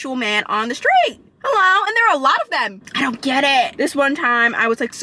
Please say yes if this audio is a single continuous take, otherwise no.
yes